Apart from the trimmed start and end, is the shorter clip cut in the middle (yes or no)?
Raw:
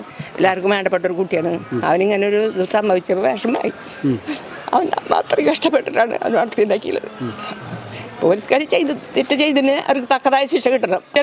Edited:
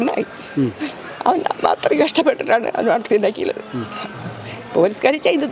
no